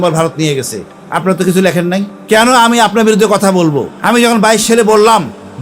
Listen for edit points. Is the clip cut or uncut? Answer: cut